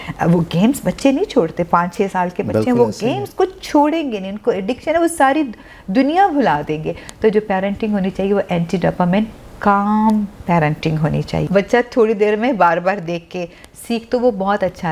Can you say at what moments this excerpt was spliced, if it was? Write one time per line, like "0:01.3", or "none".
0:11.4